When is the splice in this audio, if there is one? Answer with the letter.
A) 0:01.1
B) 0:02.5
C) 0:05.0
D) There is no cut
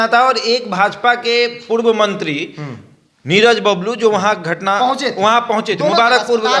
D